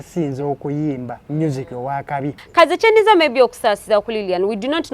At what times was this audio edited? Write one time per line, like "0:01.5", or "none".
0:02.4